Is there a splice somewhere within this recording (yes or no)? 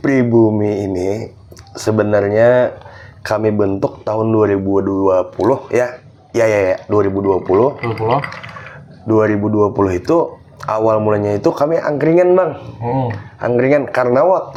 no